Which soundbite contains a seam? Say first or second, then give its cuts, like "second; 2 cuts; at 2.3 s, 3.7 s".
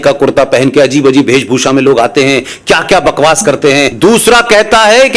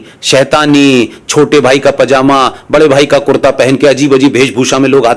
first; 1 cut; at 3.9 s